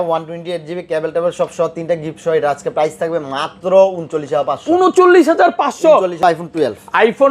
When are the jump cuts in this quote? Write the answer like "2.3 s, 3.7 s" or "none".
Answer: 6.1 s

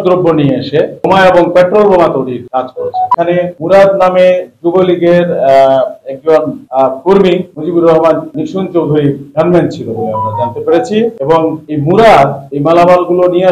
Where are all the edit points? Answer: 3.1 s, 7.5 s

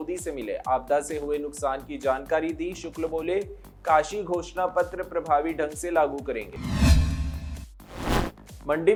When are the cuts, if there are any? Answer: none

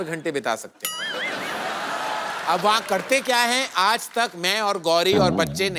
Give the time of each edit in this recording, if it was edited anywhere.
none

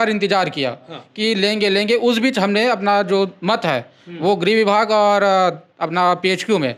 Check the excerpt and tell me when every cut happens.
none

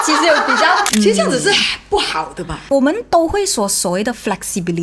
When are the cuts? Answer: 0.9 s

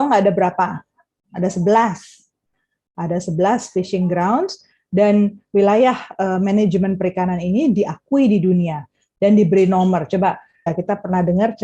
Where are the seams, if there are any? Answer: 10.7 s

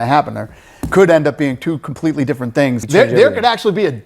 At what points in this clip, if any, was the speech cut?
2.8 s

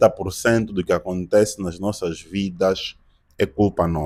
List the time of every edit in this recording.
none

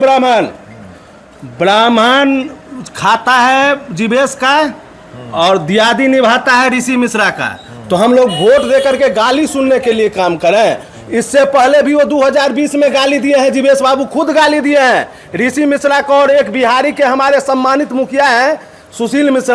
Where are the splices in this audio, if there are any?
none

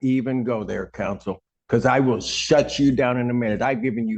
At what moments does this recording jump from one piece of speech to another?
1.5 s

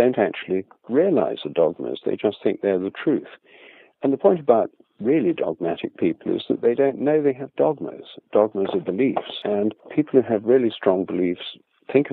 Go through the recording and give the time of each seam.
9.5 s

